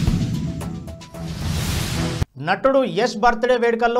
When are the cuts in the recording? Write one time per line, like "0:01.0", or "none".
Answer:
none